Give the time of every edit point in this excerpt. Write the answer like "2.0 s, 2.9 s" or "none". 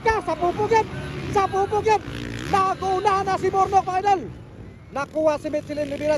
none